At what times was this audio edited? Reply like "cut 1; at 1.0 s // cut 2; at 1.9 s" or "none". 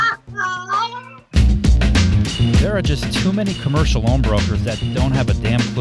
cut 1; at 1.4 s